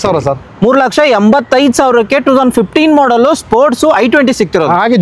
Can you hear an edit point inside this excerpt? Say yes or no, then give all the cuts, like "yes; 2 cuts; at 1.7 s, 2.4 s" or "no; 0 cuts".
no; 0 cuts